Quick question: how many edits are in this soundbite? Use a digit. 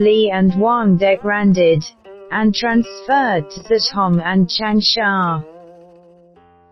1